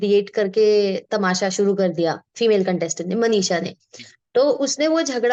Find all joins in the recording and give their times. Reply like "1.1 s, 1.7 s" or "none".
none